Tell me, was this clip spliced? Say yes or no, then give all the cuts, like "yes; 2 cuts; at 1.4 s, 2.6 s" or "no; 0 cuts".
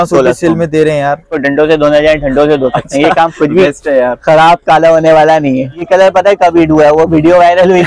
yes; 2 cuts; at 1.3 s, 5.9 s